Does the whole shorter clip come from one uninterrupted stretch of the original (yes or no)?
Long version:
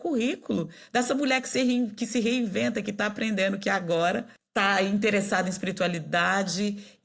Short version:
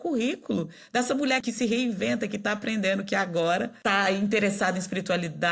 no